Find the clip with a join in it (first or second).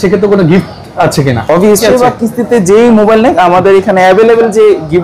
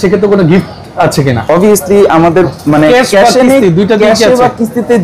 first